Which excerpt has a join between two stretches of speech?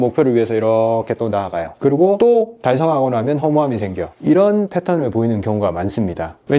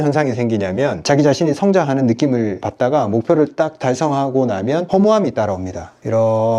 second; 1 cut; at 1.0 s

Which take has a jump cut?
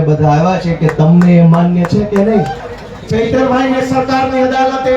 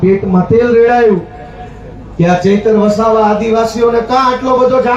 first; 1 cut; at 2.6 s

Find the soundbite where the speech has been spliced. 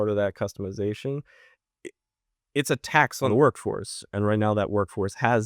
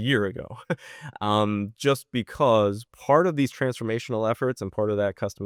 first; 1 cut; at 3.3 s

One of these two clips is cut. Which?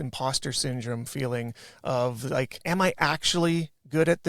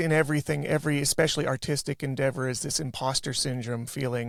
first; 1 cut; at 2.6 s

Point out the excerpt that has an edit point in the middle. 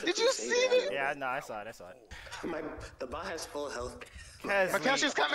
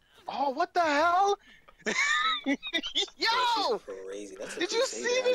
first; 1 cut; at 2.2 s

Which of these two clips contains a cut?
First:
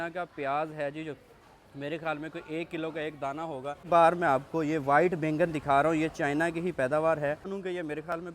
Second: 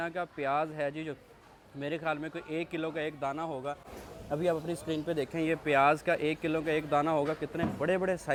first; 2 cuts; at 3.8 s, 7.5 s

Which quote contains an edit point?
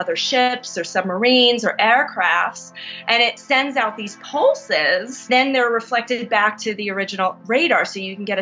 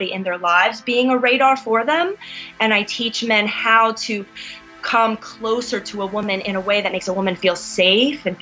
first; 1 cut; at 5.3 s

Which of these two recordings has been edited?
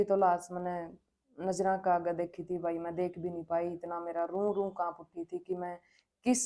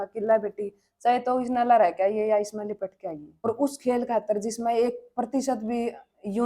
second; 1 cut; at 3.5 s

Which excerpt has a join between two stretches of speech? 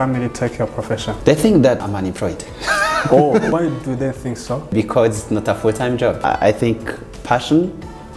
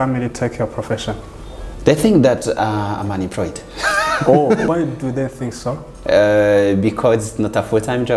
first; 4 cuts; at 1.1 s, 1.8 s, 4.7 s, 6.2 s

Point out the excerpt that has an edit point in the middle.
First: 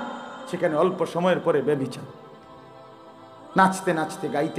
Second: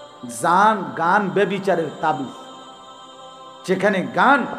first; 2 cuts; at 2.3 s, 3.5 s

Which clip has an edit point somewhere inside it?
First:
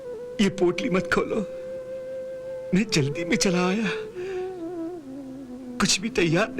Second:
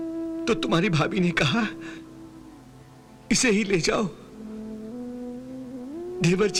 first; 1 cut; at 2.6 s

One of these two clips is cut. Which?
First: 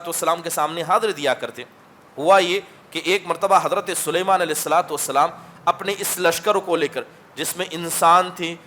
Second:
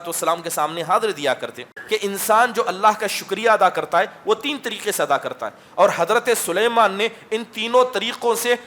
second; 1 cut; at 1.7 s

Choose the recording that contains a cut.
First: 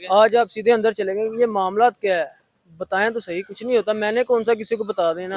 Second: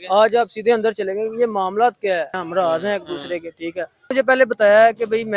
second; 2 cuts; at 2.4 s, 4.1 s

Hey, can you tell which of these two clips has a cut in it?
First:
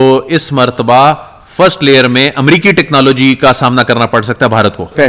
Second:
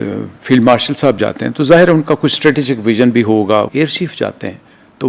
second; 1 cut; at 3.7 s

